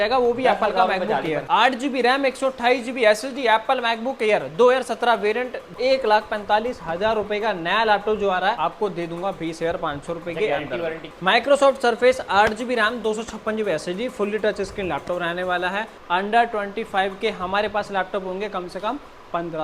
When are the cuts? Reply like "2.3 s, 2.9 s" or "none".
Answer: 1.4 s, 5.7 s, 8.6 s, 11.0 s, 15.9 s